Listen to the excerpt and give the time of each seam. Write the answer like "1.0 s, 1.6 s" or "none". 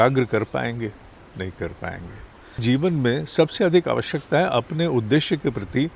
2.6 s